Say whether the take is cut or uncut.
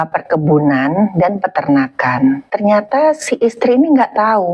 cut